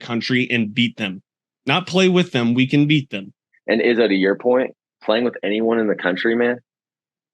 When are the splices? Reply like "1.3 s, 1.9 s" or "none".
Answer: 3.5 s